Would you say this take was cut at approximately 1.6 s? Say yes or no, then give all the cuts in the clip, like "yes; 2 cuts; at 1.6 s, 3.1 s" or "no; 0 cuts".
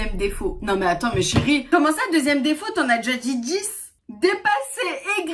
no; 1 cut; at 4.0 s